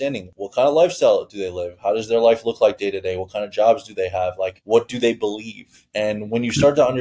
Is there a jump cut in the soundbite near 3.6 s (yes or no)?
no